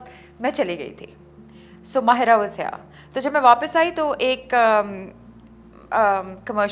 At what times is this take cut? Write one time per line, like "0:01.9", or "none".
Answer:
none

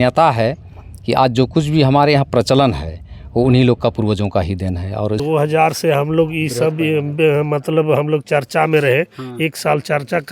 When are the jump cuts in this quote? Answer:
0:05.2

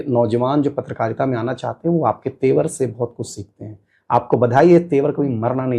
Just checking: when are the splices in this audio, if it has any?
none

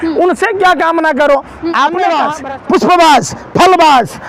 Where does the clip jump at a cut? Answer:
0:02.1

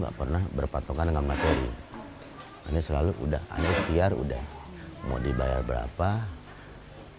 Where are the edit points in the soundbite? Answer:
none

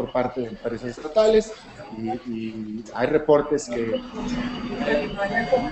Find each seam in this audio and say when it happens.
0:03.9

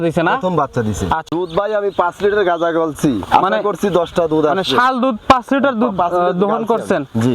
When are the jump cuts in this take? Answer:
0:01.2

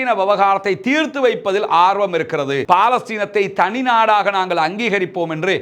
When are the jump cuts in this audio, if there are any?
0:02.6

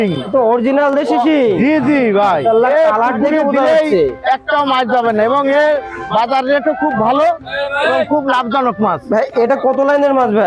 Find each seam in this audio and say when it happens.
none

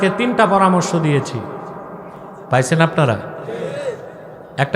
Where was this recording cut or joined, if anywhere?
0:02.3

